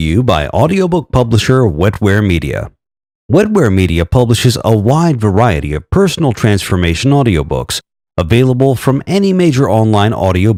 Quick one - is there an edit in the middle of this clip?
no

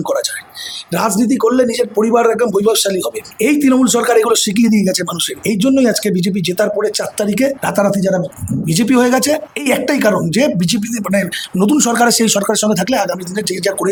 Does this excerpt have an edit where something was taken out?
no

